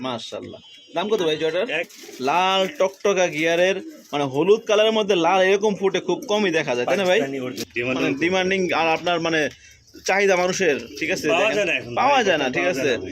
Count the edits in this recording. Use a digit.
2